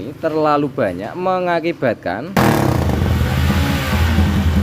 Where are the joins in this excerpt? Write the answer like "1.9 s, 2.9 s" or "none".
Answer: 2.4 s